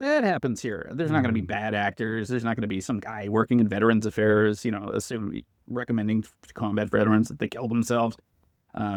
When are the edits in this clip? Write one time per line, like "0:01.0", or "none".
none